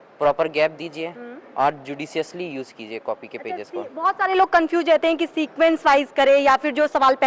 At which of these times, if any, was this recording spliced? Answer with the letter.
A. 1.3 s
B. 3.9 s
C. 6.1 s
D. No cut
D